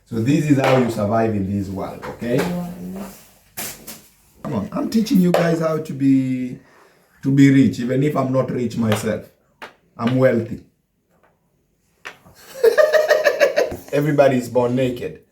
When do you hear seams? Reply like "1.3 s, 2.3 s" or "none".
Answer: 4.4 s, 13.7 s